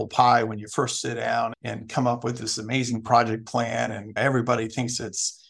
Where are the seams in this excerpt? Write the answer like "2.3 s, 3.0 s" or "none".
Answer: none